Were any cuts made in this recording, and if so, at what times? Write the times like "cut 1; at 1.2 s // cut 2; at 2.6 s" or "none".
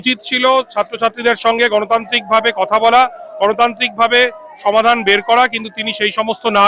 none